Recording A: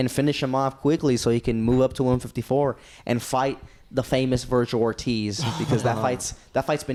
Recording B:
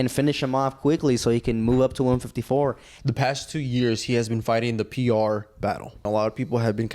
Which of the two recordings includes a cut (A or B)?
B